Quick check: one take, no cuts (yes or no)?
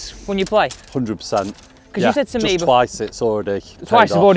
yes